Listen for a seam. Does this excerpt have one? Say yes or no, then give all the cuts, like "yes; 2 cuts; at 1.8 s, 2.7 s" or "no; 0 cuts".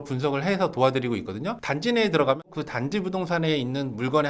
yes; 1 cut; at 2.5 s